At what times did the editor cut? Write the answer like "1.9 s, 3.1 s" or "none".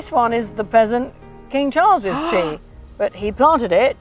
none